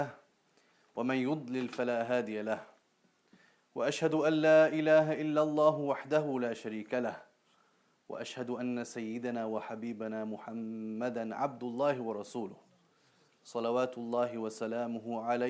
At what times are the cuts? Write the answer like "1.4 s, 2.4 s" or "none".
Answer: 12.5 s

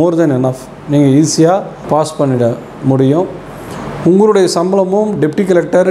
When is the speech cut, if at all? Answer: 1.8 s, 3.5 s

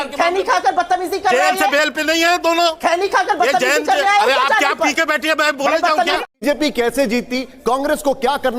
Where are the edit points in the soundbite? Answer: 6.3 s

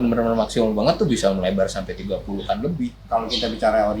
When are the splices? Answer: 3.0 s

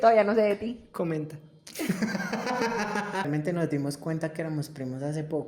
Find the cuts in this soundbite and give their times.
3.2 s

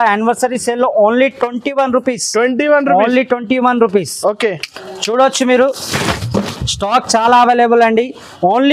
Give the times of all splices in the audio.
none

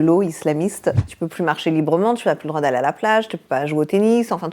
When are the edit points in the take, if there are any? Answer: 1.0 s

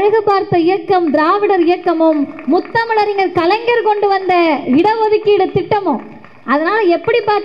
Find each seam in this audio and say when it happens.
none

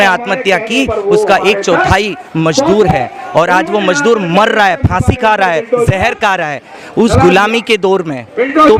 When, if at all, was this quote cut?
none

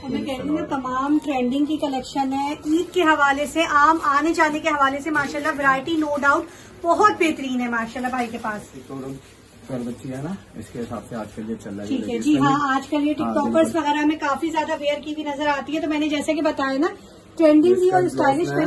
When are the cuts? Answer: 8.9 s

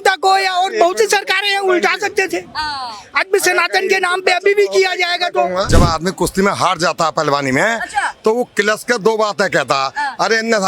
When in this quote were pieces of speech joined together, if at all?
5.7 s

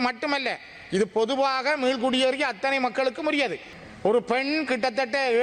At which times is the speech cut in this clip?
3.7 s

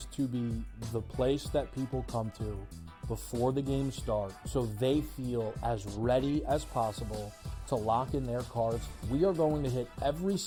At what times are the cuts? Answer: none

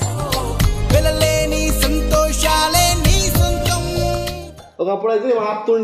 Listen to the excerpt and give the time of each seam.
4.5 s

